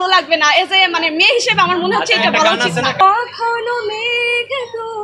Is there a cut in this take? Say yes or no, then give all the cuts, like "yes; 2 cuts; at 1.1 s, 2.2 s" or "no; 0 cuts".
yes; 1 cut; at 3.0 s